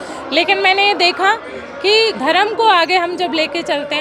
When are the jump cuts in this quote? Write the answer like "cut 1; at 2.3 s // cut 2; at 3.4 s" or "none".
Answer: cut 1; at 2.2 s